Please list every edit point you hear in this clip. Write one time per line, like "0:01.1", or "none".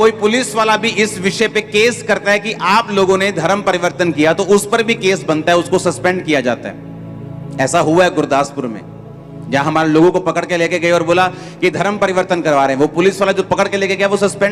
none